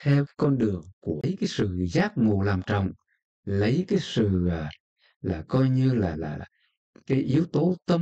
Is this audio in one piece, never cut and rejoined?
no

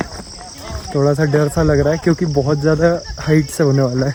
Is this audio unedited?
yes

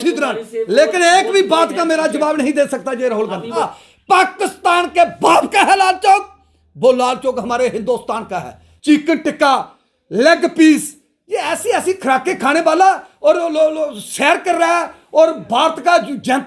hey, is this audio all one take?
no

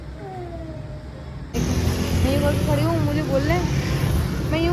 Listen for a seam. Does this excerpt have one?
yes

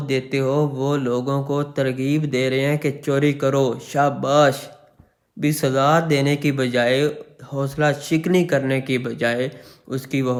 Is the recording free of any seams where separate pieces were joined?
yes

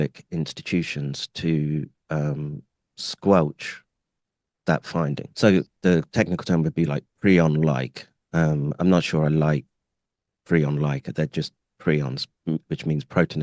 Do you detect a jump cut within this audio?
yes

